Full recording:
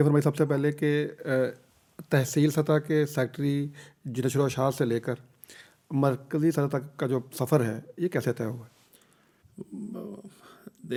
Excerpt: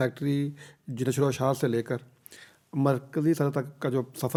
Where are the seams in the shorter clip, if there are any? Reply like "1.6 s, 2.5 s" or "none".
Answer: none